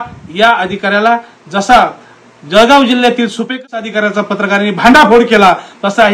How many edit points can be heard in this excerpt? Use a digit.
1